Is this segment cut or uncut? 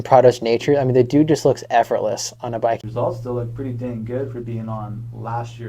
cut